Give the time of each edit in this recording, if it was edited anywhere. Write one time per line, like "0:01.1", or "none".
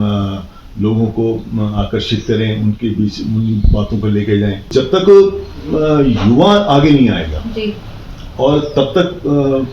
0:04.7

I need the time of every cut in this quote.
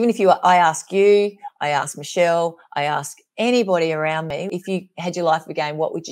0:04.4

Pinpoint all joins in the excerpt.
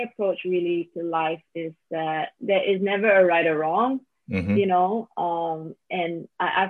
none

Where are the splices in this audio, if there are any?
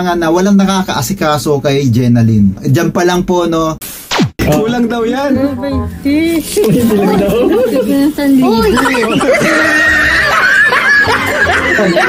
0:04.0

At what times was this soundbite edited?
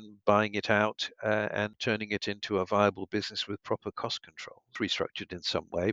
0:01.8
0:04.8

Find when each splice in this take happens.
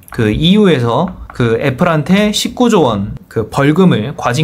0:01.2

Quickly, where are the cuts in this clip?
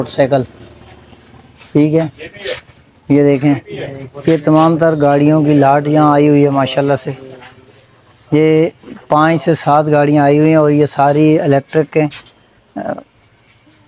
none

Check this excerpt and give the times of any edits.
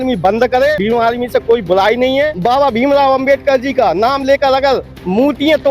0:00.8
0:02.4

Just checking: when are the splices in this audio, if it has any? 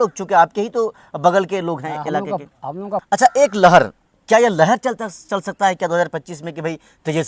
0:03.0

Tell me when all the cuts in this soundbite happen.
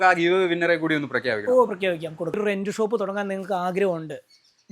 0:02.4

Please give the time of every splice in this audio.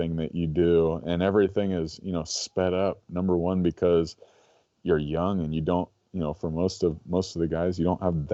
none

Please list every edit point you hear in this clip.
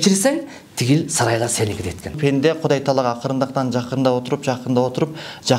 0:02.2

